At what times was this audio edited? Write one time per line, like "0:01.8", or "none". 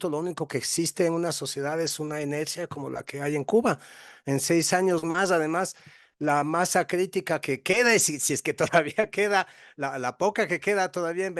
none